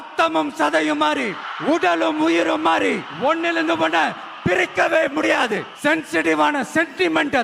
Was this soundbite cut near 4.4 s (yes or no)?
no